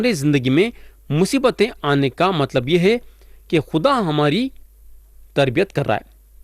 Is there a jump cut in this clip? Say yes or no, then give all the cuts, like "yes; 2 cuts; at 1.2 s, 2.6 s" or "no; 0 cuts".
no; 0 cuts